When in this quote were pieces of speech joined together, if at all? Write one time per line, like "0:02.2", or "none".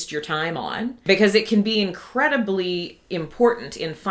0:01.0

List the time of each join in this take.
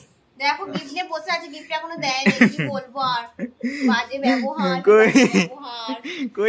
none

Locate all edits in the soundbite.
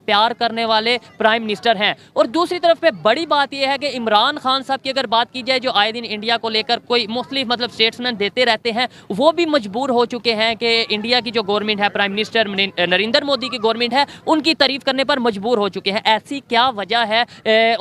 none

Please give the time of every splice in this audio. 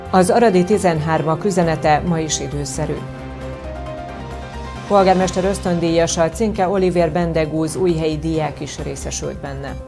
0:03.0
0:04.4

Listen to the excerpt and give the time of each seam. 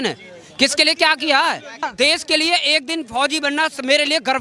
0:01.9

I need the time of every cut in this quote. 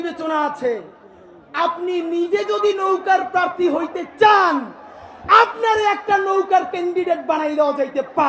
none

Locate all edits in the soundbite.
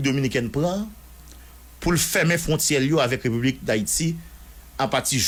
none

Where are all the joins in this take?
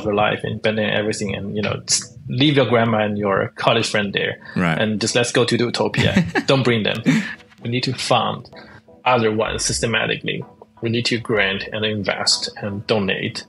0:07.5

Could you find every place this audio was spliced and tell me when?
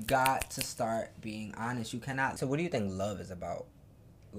0:02.4

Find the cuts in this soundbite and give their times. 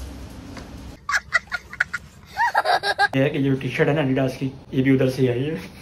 0:03.1

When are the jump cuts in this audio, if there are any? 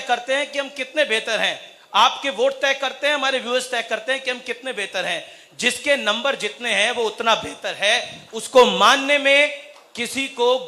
none

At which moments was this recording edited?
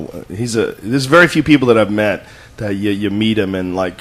none

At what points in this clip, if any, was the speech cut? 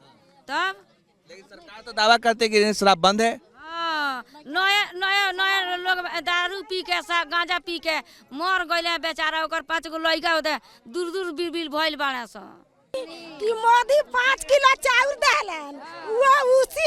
0:12.9

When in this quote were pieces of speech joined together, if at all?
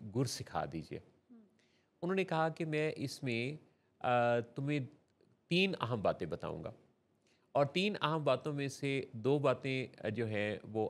none

